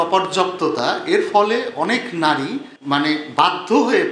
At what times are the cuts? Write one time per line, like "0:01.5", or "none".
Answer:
0:02.7